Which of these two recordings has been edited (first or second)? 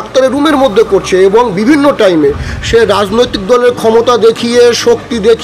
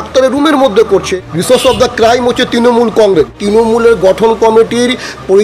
second